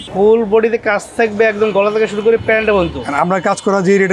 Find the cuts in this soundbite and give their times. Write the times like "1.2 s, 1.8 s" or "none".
none